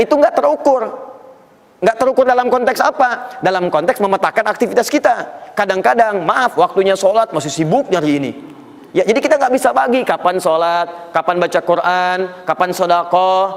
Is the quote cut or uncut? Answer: uncut